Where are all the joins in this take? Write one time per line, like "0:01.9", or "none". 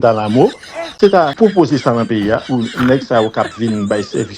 0:01.3